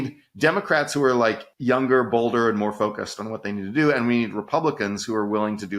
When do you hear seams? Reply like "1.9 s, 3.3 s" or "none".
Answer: 1.5 s

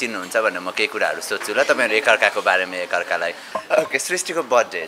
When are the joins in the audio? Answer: 3.4 s

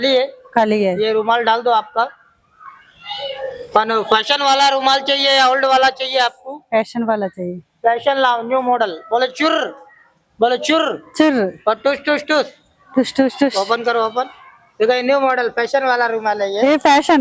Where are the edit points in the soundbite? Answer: none

